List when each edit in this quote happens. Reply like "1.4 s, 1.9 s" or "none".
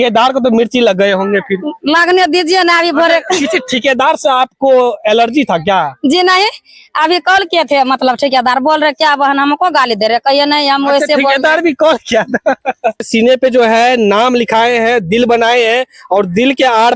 13.1 s